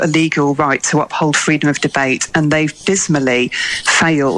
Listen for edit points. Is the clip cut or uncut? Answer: uncut